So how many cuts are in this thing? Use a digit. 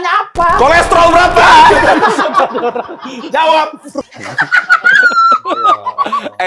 1